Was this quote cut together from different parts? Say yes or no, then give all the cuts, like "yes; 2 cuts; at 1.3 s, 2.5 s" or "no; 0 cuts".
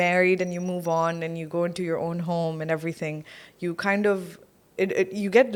no; 0 cuts